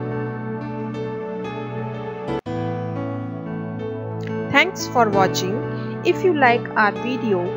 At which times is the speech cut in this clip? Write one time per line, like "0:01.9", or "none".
none